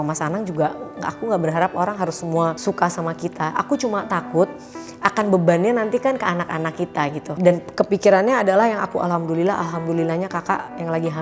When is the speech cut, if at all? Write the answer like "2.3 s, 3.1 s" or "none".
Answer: none